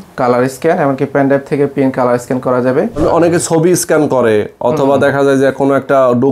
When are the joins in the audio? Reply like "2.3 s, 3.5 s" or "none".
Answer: 3.0 s